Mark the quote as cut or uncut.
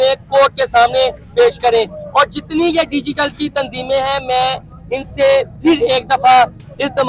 uncut